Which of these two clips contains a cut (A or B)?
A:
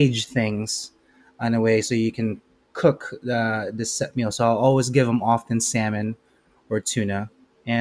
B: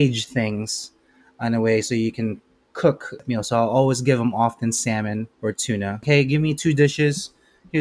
B